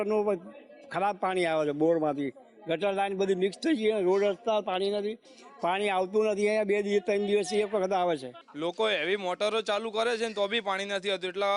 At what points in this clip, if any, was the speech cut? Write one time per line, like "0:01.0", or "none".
0:08.4